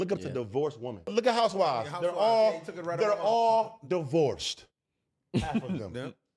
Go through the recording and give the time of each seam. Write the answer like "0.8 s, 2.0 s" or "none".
1.1 s